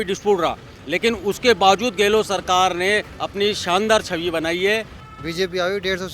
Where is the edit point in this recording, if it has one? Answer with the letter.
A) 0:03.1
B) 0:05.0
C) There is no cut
B